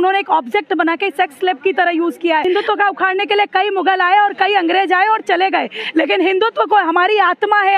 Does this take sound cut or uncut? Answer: cut